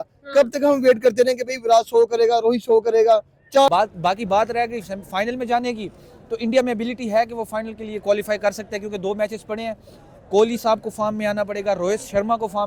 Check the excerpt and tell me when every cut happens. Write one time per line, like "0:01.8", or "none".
0:03.7